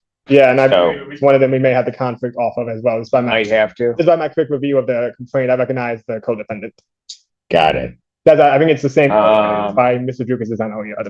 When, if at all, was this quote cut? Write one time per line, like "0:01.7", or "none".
none

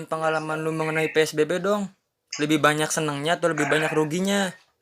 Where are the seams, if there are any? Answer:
none

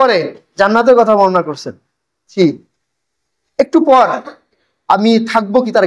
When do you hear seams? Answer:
0:02.3

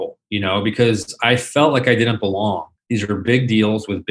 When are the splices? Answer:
0:02.7

